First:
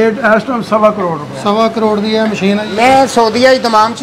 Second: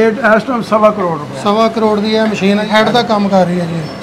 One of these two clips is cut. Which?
first; 1 cut; at 2.7 s

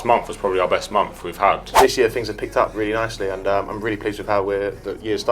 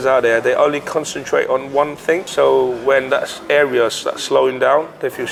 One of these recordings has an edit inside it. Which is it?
first; 1 cut; at 1.7 s

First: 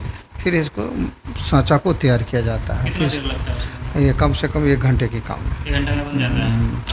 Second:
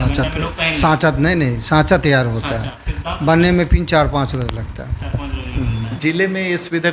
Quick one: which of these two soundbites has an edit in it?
second; 1 cut; at 5.9 s

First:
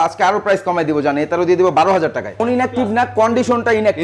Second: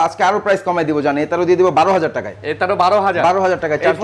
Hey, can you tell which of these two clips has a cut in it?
first; 1 cut; at 2.4 s

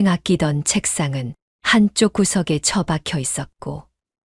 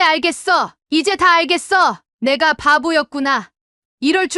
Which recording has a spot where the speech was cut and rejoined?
second; 1 cut; at 2.0 s

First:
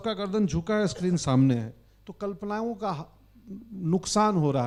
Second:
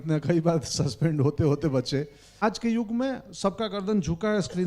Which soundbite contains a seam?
second; 1 cut; at 2.4 s

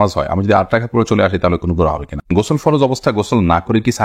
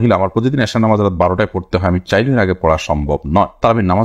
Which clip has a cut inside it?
first; 1 cut; at 2.3 s

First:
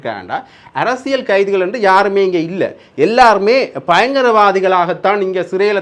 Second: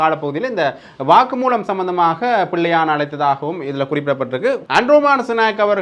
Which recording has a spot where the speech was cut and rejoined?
second; 1 cut; at 4.6 s

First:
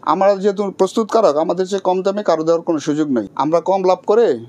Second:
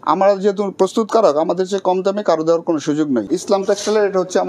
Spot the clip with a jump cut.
second; 1 cut; at 3.3 s

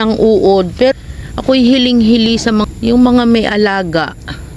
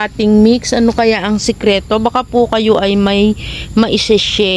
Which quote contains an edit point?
first; 2 cuts; at 0.9 s, 2.6 s

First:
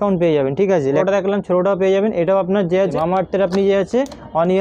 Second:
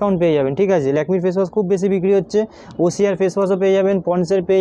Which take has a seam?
first; 2 cuts; at 1.0 s, 2.9 s

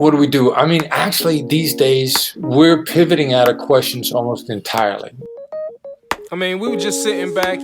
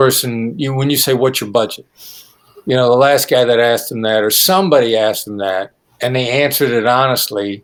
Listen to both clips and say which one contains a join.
first; 1 cut; at 5.3 s

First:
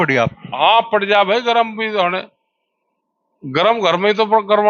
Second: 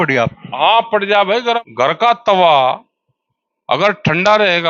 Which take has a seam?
second; 1 cut; at 1.6 s

